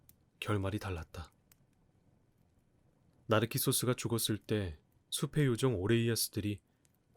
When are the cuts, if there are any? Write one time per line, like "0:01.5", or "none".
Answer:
none